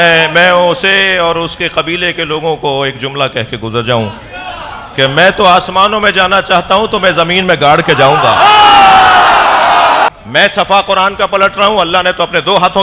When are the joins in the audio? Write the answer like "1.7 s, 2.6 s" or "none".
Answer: 10.1 s